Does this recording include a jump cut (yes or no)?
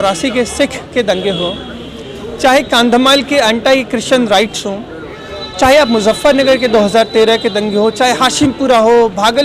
no